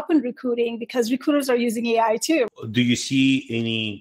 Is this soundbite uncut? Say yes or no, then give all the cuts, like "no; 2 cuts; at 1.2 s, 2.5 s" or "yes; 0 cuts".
no; 1 cut; at 2.5 s